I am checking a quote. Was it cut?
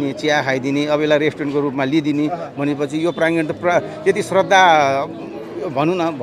no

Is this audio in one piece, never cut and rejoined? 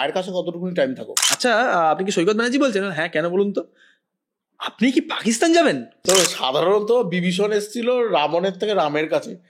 no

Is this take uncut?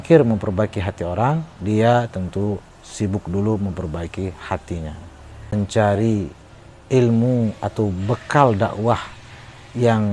no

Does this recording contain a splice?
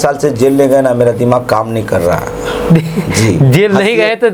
no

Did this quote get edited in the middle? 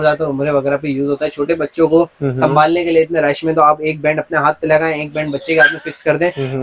no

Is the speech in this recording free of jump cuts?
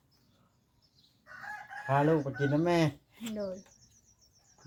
yes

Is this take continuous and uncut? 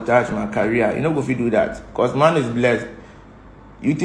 yes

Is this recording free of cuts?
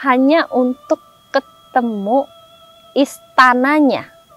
yes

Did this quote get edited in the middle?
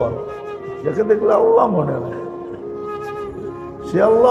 no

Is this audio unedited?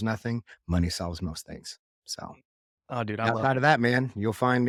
yes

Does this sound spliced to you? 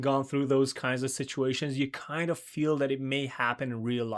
no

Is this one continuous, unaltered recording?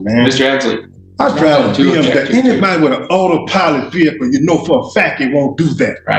yes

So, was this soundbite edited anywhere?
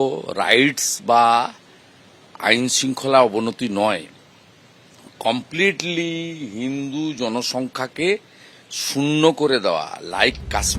no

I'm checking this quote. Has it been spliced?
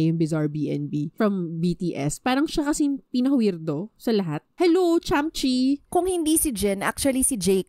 yes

